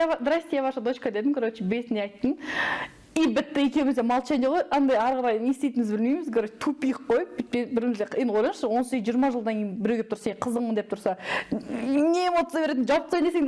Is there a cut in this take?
no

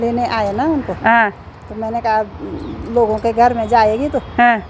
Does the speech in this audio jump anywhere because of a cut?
no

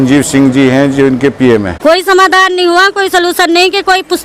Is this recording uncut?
no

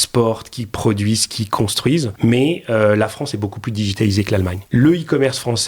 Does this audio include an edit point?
yes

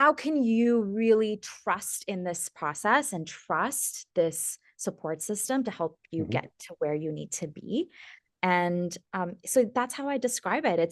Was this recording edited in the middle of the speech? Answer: no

